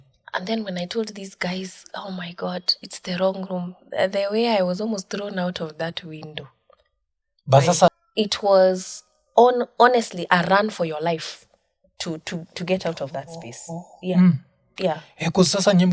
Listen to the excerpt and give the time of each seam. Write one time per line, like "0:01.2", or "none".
0:08.0